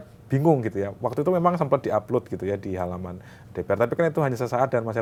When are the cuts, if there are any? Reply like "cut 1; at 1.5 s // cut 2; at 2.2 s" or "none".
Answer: none